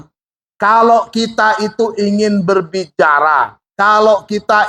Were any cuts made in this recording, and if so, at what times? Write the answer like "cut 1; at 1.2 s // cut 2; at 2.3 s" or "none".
none